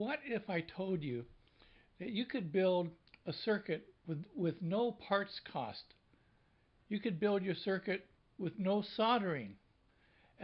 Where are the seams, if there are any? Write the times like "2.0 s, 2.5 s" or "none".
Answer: 6.4 s